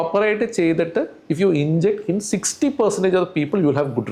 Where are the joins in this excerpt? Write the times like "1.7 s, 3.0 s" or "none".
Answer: none